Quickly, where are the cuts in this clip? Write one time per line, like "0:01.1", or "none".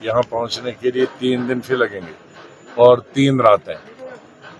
none